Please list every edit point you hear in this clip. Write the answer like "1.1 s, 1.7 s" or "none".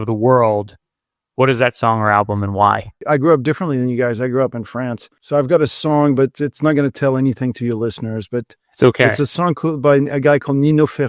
3.0 s, 5.1 s

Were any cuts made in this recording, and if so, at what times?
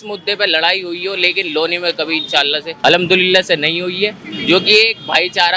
2.7 s

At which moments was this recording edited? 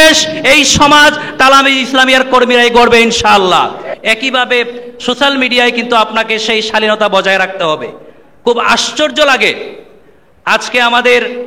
3.9 s

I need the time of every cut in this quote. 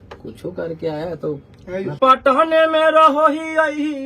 2.0 s

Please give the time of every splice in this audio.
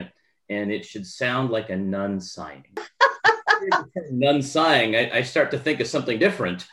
2.9 s

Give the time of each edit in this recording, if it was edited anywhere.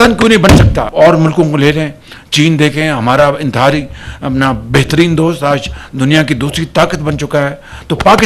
0.9 s

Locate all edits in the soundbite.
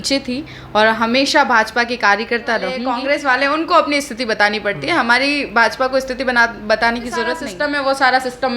2.9 s, 7.5 s

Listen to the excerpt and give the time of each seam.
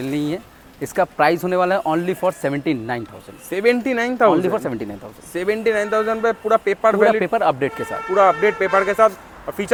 none

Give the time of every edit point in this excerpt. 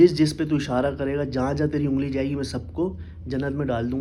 none

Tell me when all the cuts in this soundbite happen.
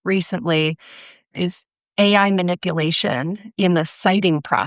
1.3 s

